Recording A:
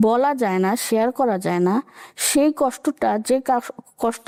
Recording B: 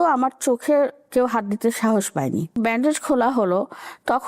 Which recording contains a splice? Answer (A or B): B